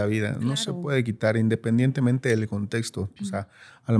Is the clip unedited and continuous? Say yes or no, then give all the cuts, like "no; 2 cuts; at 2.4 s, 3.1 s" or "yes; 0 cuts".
yes; 0 cuts